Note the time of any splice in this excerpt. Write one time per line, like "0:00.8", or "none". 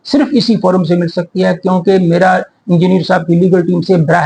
none